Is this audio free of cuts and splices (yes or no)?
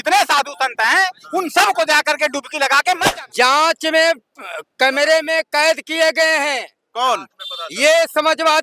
no